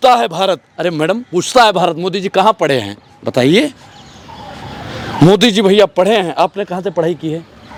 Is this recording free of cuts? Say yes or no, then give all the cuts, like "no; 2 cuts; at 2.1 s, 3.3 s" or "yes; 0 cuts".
yes; 0 cuts